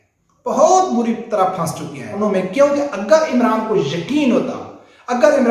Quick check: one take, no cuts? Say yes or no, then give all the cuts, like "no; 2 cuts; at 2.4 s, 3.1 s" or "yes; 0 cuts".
no; 1 cut; at 2.1 s